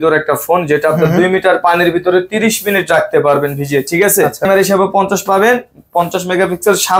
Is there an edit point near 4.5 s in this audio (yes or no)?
yes